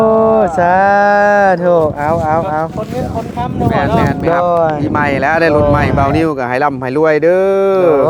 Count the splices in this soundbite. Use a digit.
1